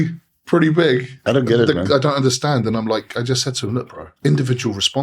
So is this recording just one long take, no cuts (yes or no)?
no